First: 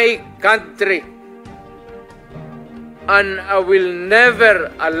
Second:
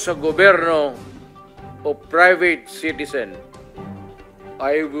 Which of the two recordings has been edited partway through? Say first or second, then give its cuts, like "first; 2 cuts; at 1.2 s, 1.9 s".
first; 2 cuts; at 1.0 s, 3.1 s